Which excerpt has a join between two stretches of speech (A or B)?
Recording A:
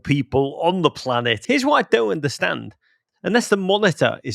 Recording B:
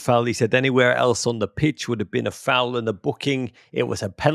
A